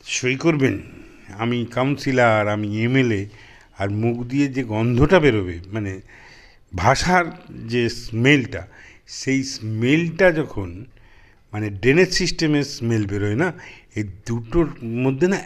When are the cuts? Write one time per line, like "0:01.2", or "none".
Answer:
none